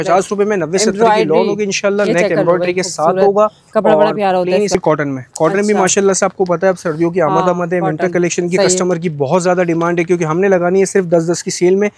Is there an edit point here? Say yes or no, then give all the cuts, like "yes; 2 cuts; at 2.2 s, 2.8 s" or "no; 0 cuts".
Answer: yes; 1 cut; at 4.8 s